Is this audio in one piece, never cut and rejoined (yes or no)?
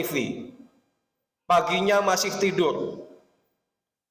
yes